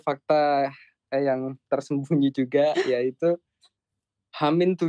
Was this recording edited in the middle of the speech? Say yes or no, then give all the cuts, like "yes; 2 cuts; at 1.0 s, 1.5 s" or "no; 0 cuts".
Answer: no; 0 cuts